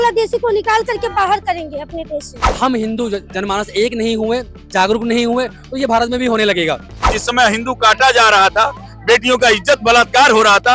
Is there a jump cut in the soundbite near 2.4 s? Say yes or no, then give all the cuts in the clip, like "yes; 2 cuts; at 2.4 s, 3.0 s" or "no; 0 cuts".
yes; 2 cuts; at 2.4 s, 7.1 s